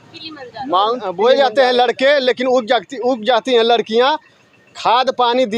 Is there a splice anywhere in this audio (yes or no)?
yes